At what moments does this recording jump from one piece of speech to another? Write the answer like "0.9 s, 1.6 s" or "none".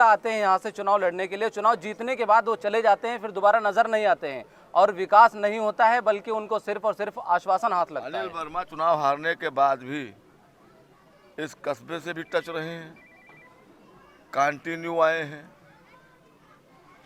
none